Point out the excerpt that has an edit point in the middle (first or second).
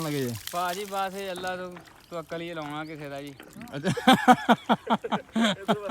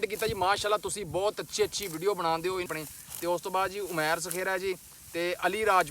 second